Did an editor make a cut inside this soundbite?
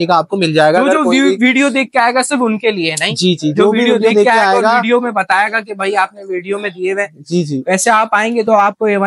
no; 0 cuts

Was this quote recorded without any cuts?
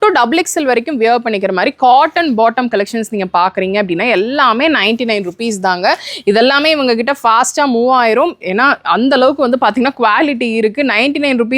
yes; 0 cuts

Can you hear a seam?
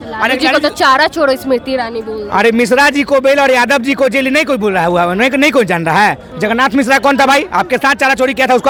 no; 0 cuts

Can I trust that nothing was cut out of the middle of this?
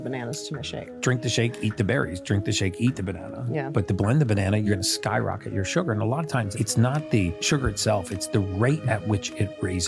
yes; 0 cuts

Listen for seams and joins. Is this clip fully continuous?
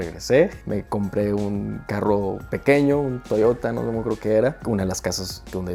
yes; 0 cuts

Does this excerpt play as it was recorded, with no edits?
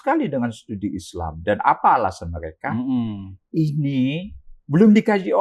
yes; 0 cuts

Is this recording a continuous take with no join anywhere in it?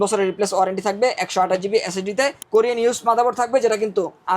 no; 1 cut; at 2.4 s

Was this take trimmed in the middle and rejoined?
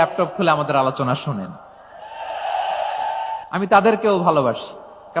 yes; 1 cut; at 3.7 s

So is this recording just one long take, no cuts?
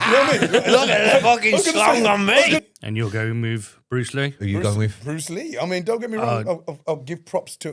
no; 1 cut; at 2.6 s

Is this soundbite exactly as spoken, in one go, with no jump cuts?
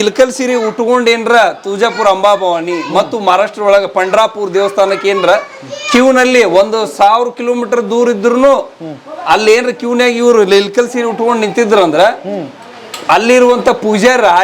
yes; 0 cuts

